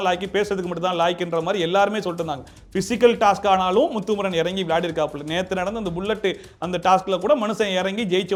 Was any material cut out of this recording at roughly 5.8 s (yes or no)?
no